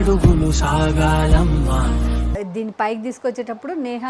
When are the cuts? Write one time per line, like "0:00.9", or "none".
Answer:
0:02.4